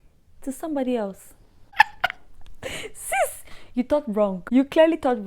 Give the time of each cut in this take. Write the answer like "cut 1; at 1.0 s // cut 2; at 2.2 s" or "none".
cut 1; at 1.7 s // cut 2; at 4.4 s